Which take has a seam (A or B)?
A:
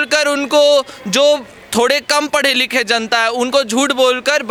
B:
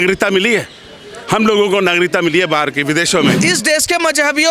B